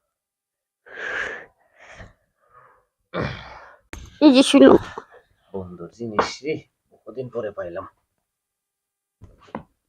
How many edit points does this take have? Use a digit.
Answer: 1